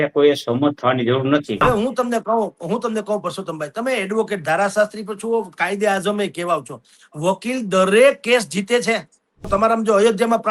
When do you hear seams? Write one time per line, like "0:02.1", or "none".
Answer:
0:01.6
0:09.4

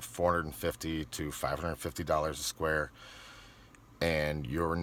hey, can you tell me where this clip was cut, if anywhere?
none

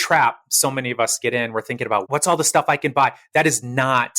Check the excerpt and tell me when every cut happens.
0:02.1

